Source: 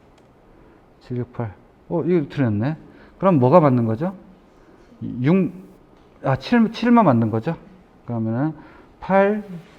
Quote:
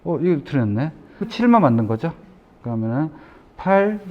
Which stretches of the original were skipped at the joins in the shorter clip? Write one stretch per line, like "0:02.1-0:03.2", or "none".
0:03.1-0:06.7